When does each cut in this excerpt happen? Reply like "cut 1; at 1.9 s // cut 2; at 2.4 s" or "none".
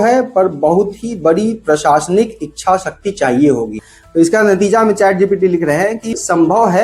cut 1; at 3.8 s